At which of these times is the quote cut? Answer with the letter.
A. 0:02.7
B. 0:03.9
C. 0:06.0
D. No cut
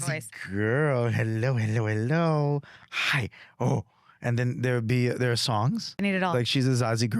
C